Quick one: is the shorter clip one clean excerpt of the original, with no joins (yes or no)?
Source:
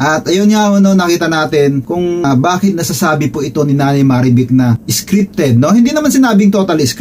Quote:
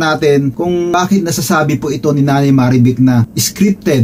no